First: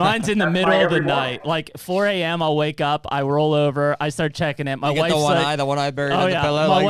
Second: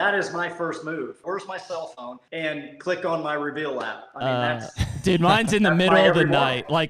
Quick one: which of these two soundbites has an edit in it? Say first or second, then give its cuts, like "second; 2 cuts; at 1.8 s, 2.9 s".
second; 2 cuts; at 1.2 s, 2.2 s